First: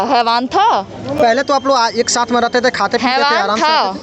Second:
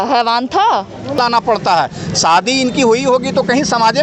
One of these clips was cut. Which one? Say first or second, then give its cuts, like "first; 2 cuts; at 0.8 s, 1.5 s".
second; 1 cut; at 1.2 s